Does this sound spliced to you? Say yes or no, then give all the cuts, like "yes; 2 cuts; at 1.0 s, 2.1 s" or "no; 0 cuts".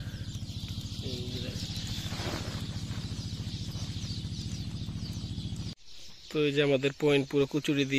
yes; 1 cut; at 5.7 s